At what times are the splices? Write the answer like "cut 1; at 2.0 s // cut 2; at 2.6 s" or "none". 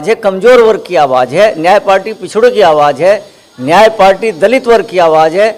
none